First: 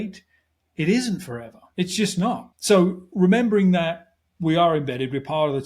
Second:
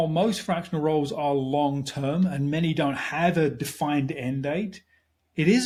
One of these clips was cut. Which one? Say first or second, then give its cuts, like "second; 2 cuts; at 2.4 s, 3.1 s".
first; 1 cut; at 2.5 s